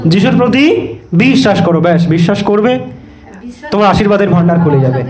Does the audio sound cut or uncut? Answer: uncut